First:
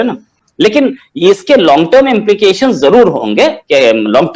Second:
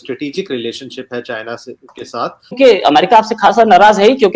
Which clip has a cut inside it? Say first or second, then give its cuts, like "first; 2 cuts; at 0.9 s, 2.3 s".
second; 1 cut; at 2.5 s